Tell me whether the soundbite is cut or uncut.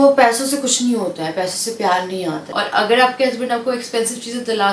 cut